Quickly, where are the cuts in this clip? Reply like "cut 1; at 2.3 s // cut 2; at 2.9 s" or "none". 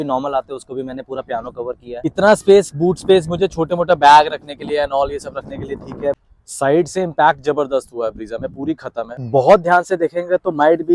cut 1; at 2.0 s // cut 2; at 6.2 s // cut 3; at 9.2 s